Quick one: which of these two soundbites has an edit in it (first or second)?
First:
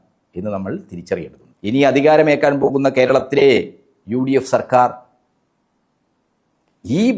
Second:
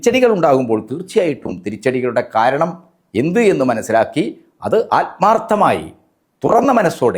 first